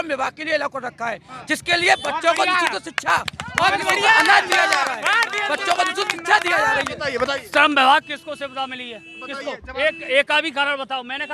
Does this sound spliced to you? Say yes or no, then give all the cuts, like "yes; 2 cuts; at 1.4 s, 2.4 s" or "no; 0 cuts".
no; 0 cuts